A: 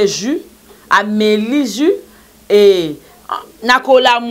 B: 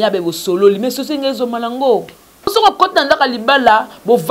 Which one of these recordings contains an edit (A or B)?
B